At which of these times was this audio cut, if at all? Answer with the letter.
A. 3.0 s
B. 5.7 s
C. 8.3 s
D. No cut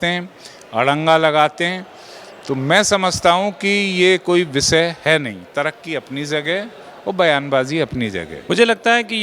C